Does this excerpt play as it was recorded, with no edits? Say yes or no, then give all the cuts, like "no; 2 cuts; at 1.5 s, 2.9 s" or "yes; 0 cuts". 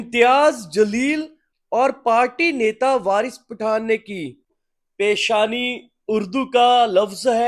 no; 1 cut; at 4.4 s